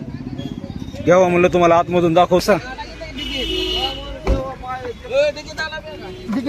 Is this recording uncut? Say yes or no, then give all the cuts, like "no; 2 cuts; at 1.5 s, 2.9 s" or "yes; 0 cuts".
no; 1 cut; at 2.4 s